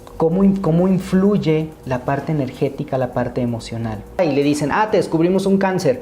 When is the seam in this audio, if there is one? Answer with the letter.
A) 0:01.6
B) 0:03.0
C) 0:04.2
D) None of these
C